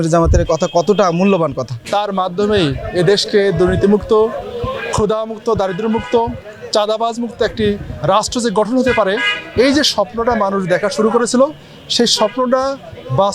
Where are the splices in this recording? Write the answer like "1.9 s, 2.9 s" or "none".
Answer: 1.7 s